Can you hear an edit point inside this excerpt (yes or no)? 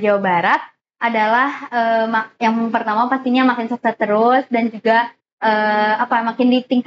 no